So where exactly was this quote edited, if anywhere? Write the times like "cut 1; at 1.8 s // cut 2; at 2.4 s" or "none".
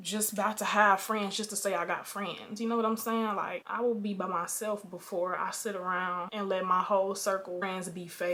none